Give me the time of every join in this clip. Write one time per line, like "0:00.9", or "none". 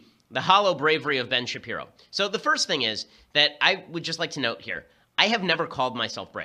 none